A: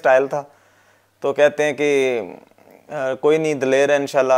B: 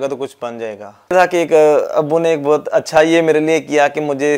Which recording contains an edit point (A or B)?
B